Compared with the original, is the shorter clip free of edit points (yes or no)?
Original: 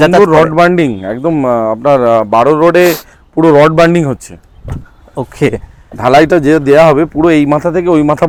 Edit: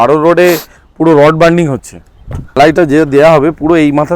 no